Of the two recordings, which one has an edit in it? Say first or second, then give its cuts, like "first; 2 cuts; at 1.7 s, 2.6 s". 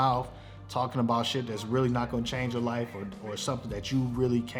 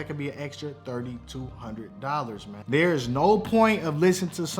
second; 1 cut; at 2.5 s